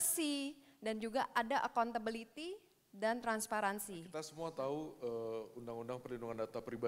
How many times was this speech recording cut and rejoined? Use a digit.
1